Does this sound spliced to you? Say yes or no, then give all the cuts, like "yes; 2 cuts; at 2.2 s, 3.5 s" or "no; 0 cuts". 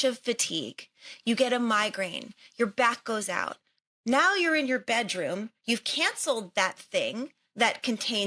no; 0 cuts